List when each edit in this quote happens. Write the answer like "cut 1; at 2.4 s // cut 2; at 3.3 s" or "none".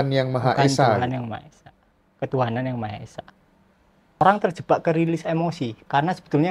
cut 1; at 4.2 s